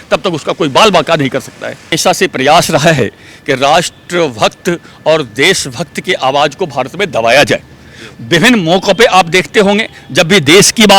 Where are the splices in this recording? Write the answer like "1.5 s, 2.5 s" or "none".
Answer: 1.9 s